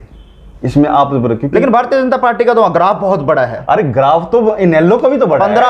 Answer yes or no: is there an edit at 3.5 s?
no